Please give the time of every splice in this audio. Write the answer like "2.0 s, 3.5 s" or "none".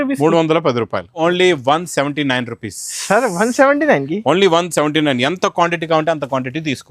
1.2 s

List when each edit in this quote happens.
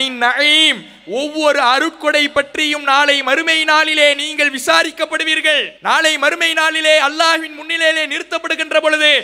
5.7 s

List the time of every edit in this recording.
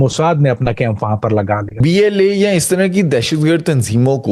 1.8 s

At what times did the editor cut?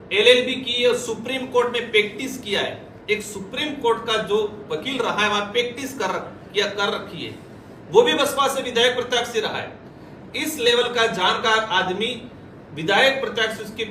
none

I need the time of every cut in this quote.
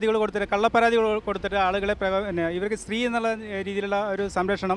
none

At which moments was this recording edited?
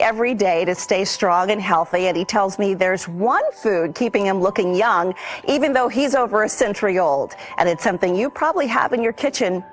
none

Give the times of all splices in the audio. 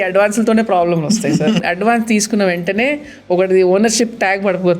1.6 s

